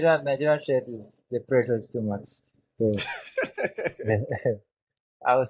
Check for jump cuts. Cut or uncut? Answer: uncut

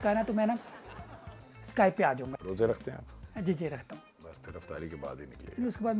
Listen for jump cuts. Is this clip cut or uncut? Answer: cut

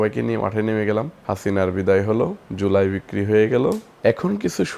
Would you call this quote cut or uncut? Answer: cut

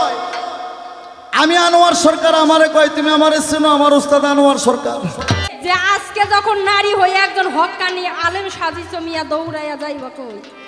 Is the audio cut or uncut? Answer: cut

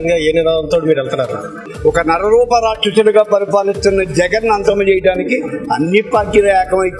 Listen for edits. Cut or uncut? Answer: cut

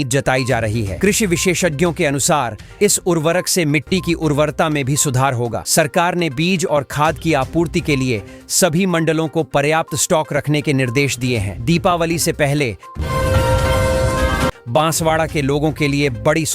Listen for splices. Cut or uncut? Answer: cut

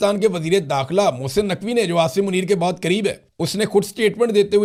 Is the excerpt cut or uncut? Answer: uncut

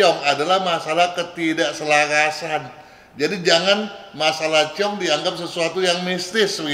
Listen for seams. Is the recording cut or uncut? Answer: uncut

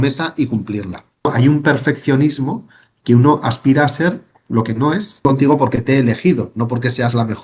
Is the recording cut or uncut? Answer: cut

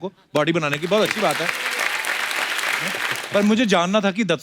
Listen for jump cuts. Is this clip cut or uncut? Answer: cut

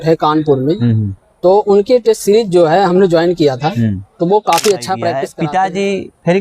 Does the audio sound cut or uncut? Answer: cut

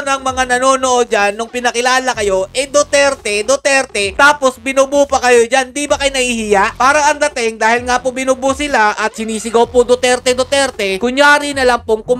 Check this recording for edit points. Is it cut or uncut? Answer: cut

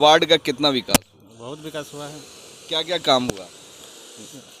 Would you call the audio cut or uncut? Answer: uncut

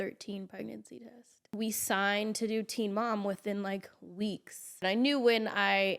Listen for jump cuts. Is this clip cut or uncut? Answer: cut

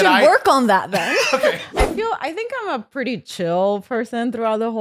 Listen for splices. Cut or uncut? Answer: cut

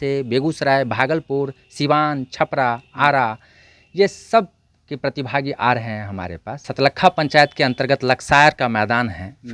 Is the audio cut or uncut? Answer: cut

